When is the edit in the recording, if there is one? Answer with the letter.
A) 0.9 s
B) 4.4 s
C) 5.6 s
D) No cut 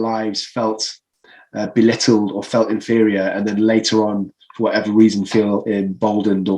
D